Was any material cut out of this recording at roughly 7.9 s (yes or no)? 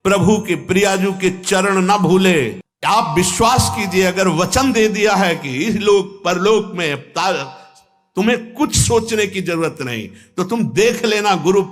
no